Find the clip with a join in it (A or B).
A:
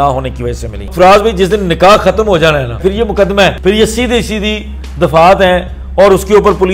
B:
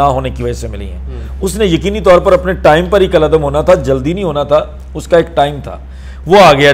A